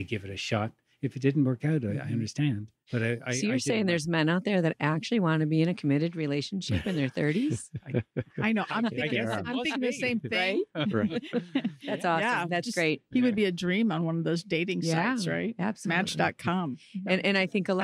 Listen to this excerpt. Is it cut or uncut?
uncut